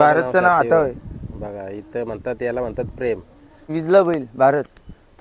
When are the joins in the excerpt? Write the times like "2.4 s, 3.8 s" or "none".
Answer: 3.7 s

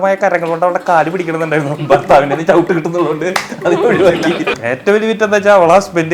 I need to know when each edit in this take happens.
4.5 s

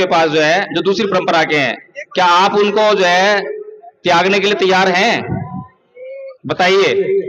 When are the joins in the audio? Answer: none

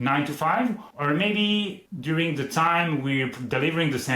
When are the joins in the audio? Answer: 0.9 s, 1.9 s

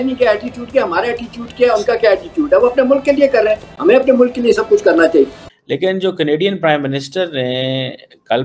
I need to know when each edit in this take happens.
5.4 s

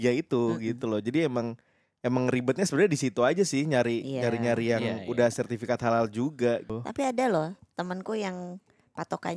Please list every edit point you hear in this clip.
6.7 s

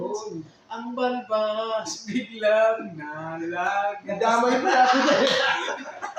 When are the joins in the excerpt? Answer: none

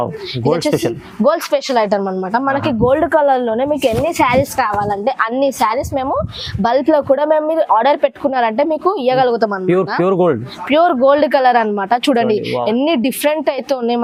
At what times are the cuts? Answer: none

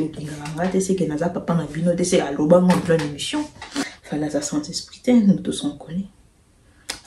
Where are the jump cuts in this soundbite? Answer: 3.8 s

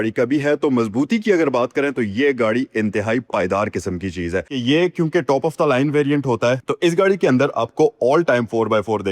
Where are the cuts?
4.5 s

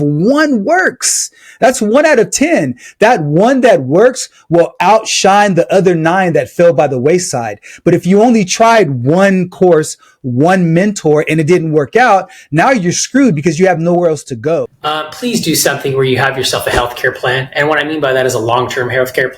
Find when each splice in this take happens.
14.8 s

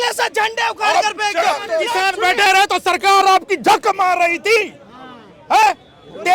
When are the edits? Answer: 1.8 s

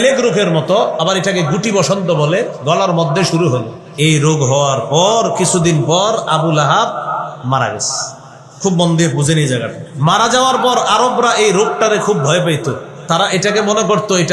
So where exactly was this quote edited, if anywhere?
3.8 s, 7.4 s, 9.8 s

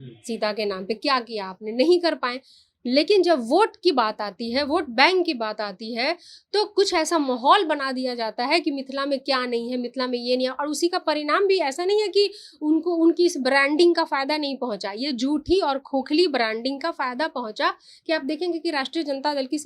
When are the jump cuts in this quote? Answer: none

